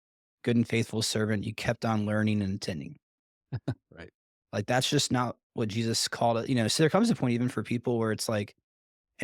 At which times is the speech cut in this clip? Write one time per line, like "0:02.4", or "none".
none